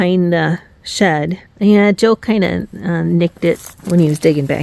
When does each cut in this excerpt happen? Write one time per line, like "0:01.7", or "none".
0:01.4
0:03.7